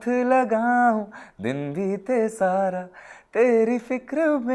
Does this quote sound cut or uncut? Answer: uncut